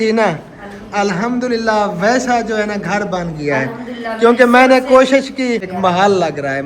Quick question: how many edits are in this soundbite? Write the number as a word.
one